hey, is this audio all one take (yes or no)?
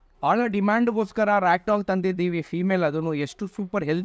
yes